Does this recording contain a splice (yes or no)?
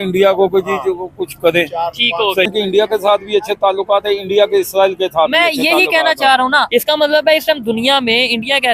yes